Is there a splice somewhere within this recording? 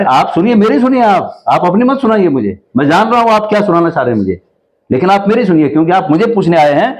no; 0 cuts

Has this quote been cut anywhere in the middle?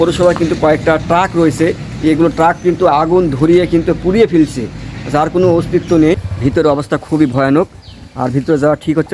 yes; 1 cut; at 6.2 s

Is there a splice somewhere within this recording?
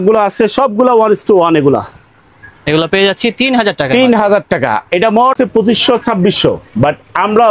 yes; 1 cut; at 5.4 s

